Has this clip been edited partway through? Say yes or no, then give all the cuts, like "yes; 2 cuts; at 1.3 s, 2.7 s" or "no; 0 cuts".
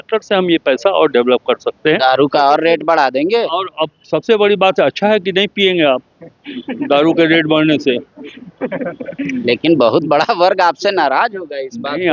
no; 0 cuts